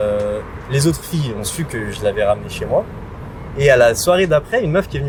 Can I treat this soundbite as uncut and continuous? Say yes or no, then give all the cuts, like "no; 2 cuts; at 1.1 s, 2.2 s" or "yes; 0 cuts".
yes; 0 cuts